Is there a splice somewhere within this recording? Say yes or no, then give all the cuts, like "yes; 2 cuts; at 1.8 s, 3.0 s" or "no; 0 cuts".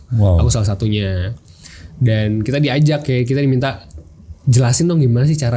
no; 0 cuts